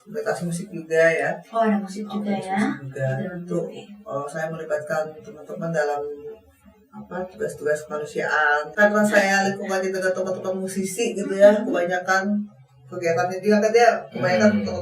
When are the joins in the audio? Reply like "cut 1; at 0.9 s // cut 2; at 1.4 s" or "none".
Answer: cut 1; at 8.7 s

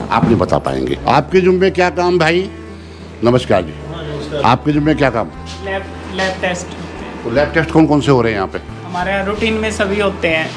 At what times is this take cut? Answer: none

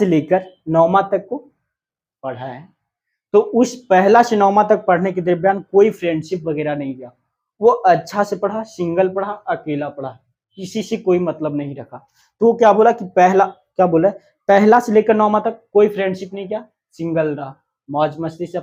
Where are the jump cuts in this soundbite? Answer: none

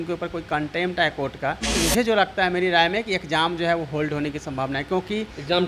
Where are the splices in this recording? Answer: cut 1; at 1.8 s

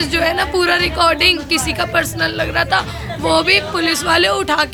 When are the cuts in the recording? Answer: none

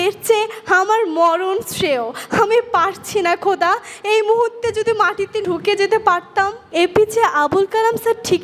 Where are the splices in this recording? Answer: cut 1; at 6.6 s

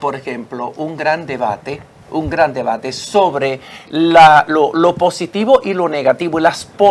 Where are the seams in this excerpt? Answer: none

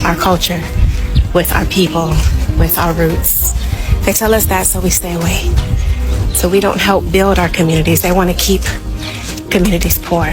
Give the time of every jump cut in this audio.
none

